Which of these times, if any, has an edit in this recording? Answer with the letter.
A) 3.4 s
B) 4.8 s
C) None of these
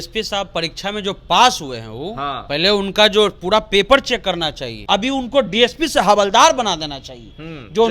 B